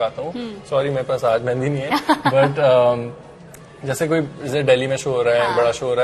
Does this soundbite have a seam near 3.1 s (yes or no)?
no